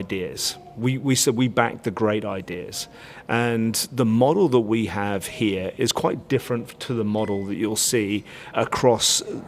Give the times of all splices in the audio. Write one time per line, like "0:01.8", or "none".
0:08.5